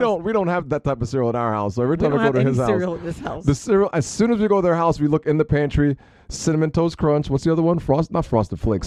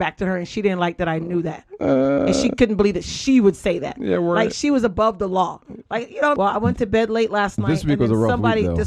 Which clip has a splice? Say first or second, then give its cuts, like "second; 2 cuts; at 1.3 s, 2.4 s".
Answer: second; 1 cut; at 6.4 s